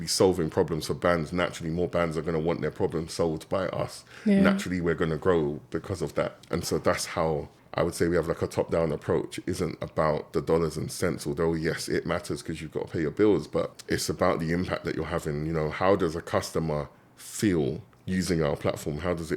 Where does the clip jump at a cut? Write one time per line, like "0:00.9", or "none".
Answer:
0:06.4
0:07.6
0:10.2
0:13.8
0:17.9